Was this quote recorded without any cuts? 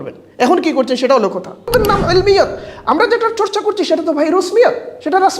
no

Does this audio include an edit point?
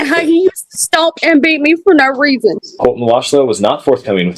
yes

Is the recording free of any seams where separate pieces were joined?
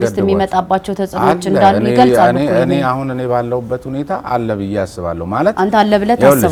yes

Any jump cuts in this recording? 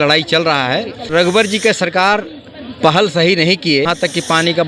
yes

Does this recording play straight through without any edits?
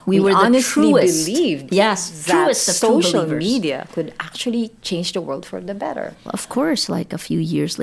no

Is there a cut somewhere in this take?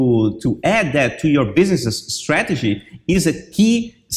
no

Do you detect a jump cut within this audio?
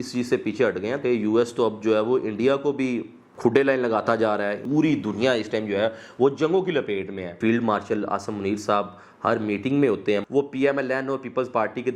yes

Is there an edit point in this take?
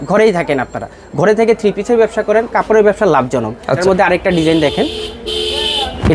yes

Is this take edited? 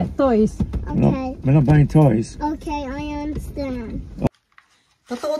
yes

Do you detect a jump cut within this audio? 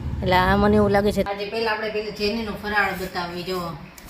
yes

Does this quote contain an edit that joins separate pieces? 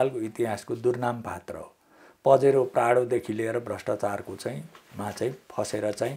no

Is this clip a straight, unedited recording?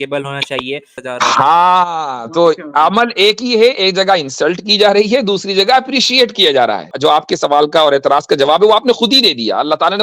no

